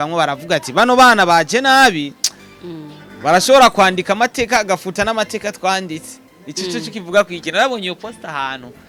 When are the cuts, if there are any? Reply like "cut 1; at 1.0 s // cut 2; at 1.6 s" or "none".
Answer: none